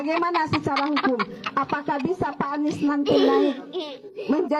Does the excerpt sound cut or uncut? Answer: uncut